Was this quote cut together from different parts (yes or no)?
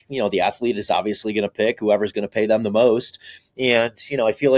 no